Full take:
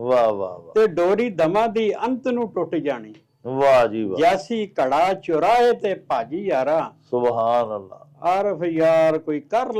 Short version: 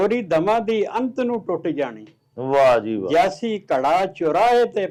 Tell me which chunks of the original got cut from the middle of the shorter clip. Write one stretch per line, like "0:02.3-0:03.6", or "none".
none